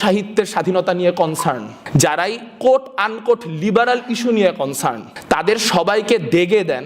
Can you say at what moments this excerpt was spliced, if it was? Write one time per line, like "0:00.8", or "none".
0:01.7
0:05.1